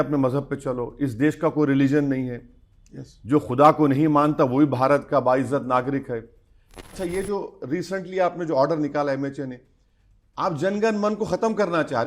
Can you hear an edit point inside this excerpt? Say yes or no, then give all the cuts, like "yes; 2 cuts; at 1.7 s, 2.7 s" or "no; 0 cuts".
yes; 1 cut; at 6.8 s